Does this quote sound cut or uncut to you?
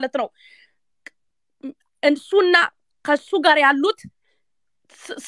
uncut